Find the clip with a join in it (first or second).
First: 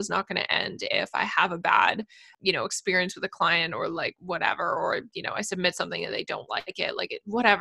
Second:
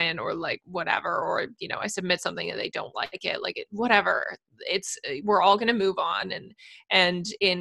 first